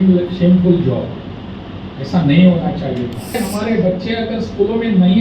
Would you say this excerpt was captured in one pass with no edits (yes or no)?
no